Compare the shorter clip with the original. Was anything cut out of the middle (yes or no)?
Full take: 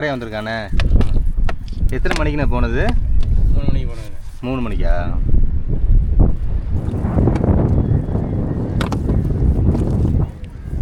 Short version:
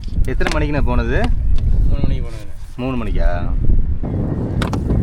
yes